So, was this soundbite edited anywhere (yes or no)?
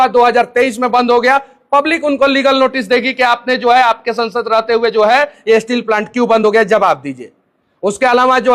no